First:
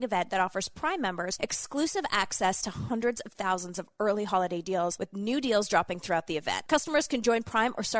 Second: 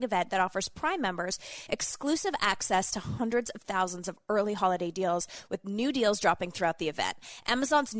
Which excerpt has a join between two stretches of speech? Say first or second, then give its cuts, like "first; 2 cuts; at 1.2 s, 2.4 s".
first; 3 cuts; at 1.3 s, 5.0 s, 6.5 s